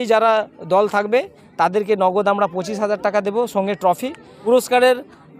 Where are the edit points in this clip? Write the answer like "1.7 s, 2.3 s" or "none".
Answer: 4.3 s